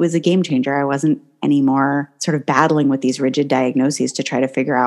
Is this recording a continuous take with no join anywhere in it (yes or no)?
no